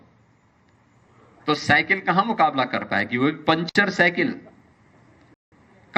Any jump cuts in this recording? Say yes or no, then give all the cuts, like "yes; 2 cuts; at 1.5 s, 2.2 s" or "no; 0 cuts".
no; 0 cuts